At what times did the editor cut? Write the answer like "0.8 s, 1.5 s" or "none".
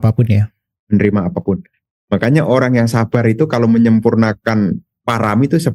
1.7 s